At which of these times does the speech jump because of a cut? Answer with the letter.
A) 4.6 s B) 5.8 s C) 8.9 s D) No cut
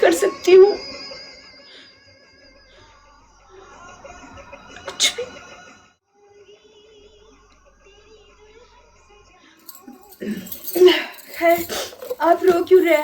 B